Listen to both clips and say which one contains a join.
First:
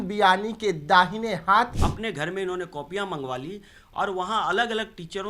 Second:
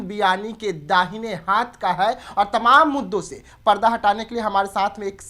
first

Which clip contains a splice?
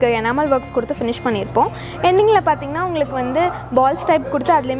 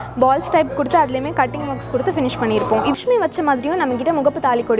second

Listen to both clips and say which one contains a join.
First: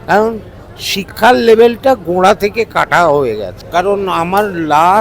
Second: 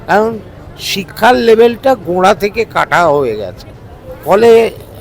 first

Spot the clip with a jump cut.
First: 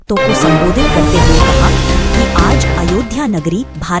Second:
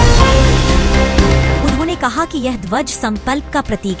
second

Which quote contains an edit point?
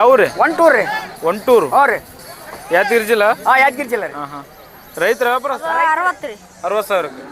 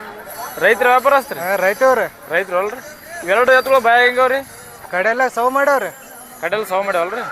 first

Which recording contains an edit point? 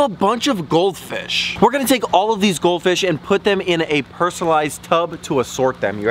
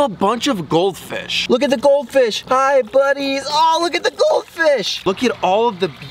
second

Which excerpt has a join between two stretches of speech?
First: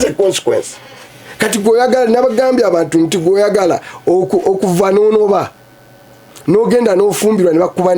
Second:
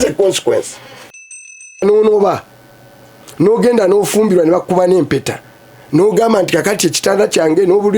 second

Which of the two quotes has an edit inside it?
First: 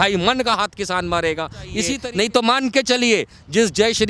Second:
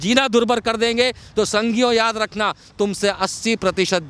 first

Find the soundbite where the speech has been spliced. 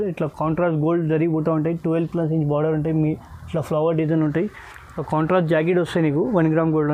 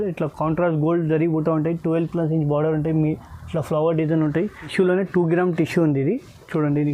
second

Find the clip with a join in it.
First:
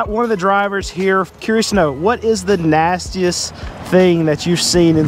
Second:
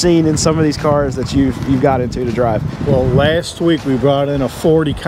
first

